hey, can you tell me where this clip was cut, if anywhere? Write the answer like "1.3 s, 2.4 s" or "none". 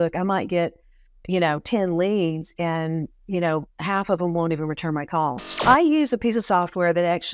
5.5 s